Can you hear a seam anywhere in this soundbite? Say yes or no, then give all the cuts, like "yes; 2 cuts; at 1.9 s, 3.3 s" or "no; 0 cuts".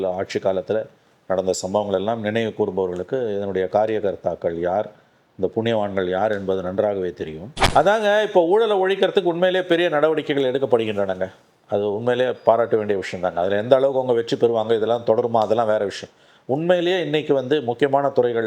yes; 1 cut; at 7.6 s